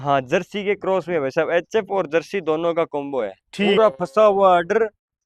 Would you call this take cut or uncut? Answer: uncut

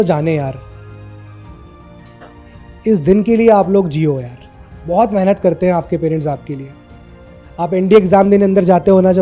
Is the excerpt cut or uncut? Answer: uncut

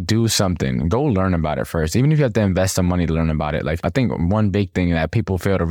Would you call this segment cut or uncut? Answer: cut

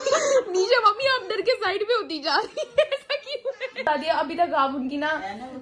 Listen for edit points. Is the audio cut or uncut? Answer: cut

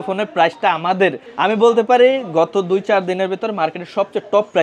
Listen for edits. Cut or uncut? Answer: cut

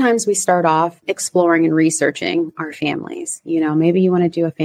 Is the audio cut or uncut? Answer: cut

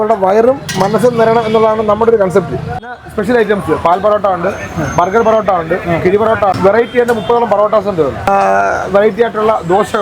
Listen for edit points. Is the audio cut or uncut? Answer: cut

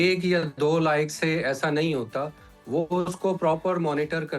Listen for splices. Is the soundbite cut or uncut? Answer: uncut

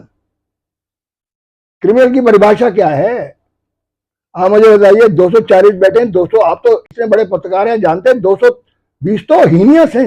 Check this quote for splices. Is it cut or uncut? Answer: uncut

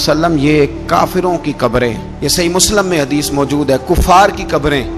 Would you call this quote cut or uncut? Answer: uncut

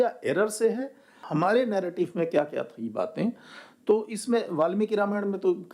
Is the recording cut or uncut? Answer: cut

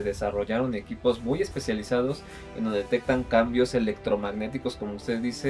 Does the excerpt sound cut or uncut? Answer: uncut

